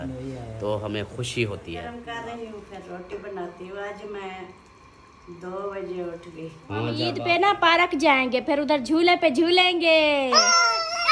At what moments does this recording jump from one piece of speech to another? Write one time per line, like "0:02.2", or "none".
0:02.0
0:07.1